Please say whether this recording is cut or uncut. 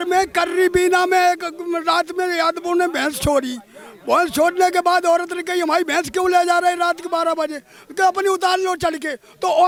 uncut